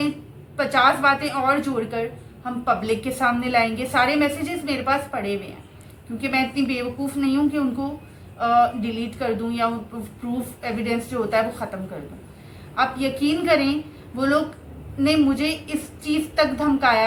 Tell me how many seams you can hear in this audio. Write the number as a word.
zero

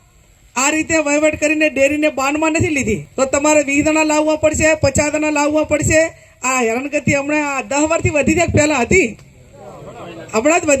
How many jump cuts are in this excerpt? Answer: one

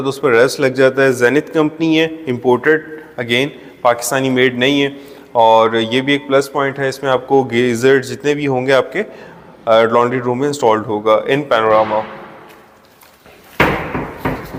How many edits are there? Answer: zero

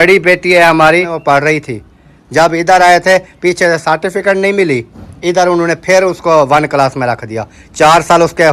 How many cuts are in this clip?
one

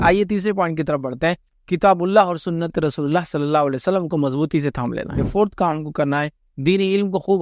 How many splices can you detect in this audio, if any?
two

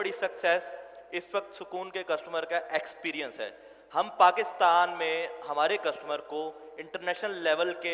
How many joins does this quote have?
zero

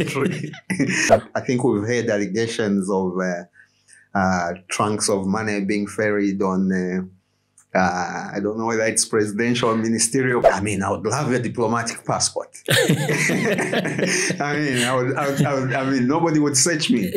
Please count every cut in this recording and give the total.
two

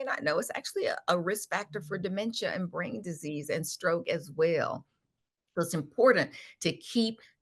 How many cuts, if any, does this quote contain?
zero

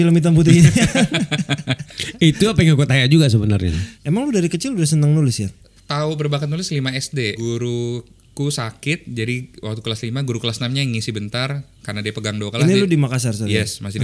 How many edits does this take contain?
three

